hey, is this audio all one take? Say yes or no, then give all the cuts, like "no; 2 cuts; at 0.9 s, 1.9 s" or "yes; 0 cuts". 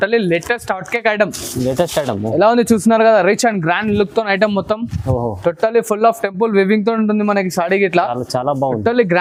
yes; 0 cuts